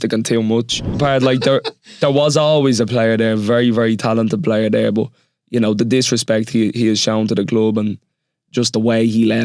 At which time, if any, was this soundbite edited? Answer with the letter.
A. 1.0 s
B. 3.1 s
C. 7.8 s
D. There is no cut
A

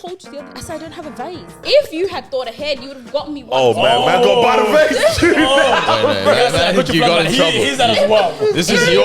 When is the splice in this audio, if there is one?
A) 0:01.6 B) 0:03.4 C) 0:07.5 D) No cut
A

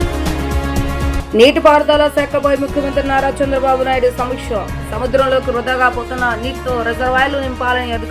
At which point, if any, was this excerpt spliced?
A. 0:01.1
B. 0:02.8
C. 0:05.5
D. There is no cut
A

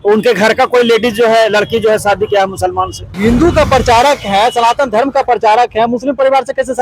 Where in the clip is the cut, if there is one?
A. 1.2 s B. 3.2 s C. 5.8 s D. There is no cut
B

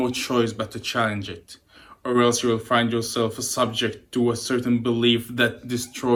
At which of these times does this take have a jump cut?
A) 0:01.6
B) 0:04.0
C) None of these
C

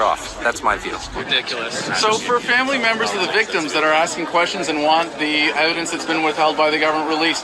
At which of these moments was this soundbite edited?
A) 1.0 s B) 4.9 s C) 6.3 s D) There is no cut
A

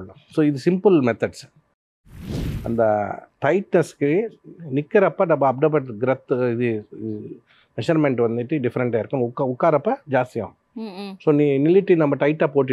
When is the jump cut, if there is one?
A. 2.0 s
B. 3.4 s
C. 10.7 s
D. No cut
A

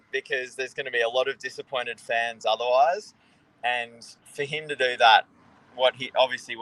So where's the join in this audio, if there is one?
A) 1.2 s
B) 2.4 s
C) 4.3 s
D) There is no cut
D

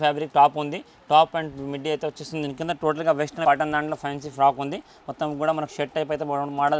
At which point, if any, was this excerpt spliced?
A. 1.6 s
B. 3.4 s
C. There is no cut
B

